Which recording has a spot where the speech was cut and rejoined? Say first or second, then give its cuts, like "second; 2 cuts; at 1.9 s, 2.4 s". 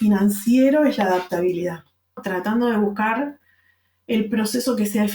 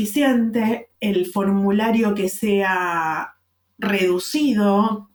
first; 1 cut; at 2.2 s